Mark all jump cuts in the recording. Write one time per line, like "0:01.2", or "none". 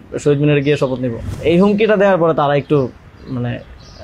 0:01.3